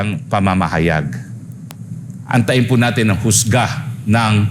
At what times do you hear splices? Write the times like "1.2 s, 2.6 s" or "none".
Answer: none